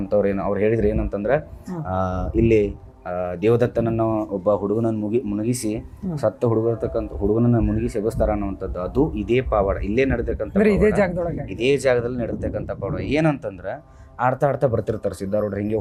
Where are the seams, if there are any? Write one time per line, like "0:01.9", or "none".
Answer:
none